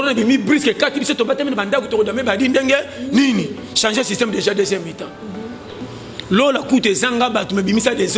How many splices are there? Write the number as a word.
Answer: one